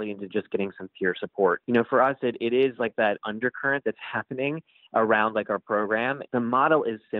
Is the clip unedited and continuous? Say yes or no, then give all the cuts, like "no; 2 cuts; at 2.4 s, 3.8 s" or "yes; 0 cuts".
no; 3 cuts; at 1.6 s, 3.2 s, 6.2 s